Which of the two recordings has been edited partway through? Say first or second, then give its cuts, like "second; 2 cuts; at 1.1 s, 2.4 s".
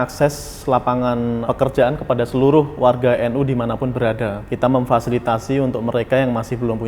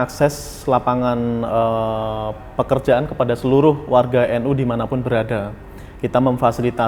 first; 2 cuts; at 1.4 s, 4.4 s